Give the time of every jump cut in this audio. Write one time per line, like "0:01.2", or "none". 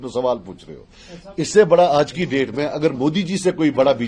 none